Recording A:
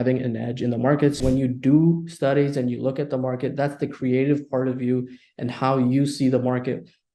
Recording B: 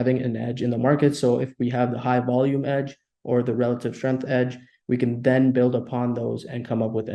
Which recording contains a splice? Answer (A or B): A